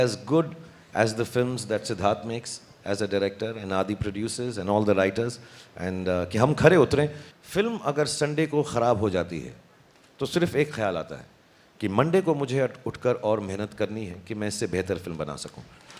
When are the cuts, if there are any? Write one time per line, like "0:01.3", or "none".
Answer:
0:07.3